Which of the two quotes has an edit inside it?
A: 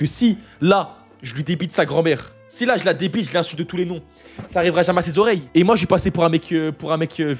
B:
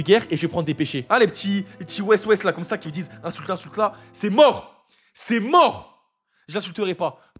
B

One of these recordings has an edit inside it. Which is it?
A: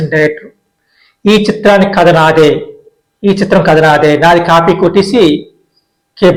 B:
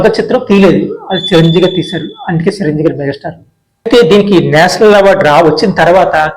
B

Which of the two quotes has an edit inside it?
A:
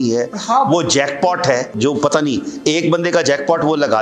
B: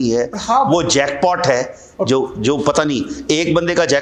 A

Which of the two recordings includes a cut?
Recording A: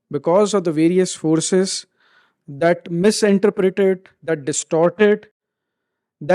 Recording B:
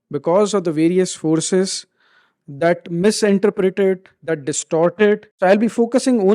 B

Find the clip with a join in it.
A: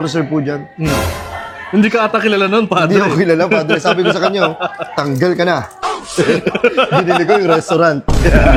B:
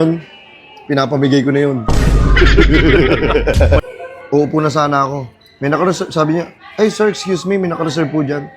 B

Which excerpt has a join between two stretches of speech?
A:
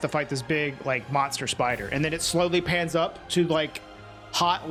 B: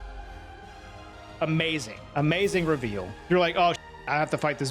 B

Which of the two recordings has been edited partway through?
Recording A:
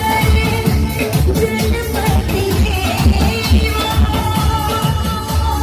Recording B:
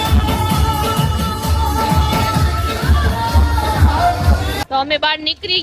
B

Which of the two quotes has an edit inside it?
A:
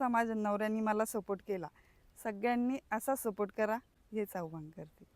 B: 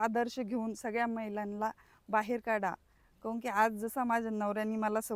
A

